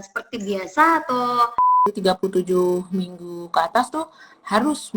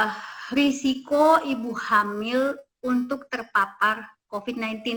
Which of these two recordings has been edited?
first; 1 cut; at 1.8 s

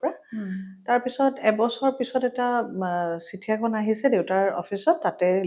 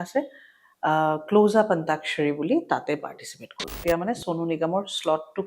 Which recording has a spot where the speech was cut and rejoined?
second; 1 cut; at 3.8 s

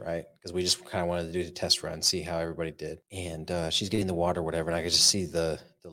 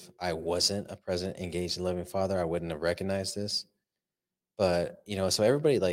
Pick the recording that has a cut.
first; 1 cut; at 3.1 s

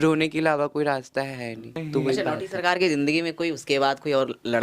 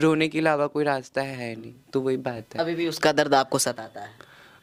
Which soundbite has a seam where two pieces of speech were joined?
first; 1 cut; at 2.2 s

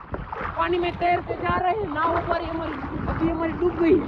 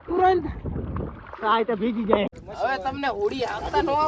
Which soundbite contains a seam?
second; 1 cut; at 2.3 s

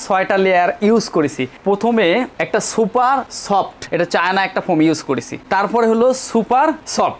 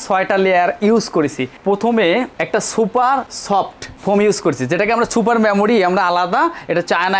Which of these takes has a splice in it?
first; 1 cut; at 3.8 s

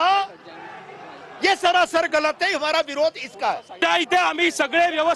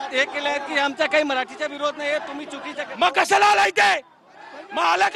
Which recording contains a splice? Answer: first; 1 cut; at 3.8 s

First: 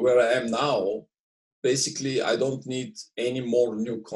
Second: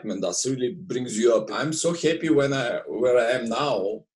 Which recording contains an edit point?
second; 1 cut; at 1.5 s

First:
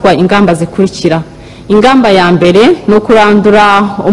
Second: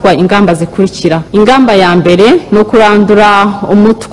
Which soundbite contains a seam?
second; 1 cut; at 1.2 s

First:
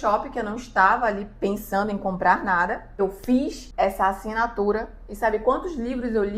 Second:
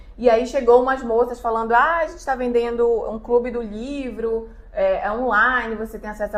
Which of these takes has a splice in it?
first; 2 cuts; at 3.0 s, 3.6 s

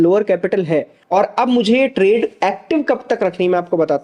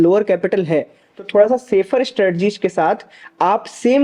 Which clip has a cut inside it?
first; 1 cut; at 1.0 s

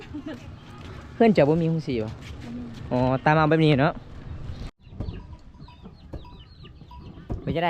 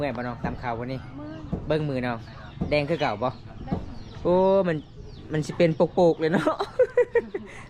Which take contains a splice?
first; 1 cut; at 4.7 s

